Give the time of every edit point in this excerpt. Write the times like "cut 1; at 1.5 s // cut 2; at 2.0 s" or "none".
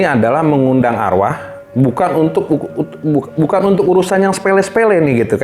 none